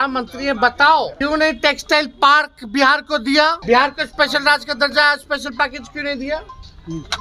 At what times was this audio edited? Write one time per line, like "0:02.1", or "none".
0:01.1
0:03.6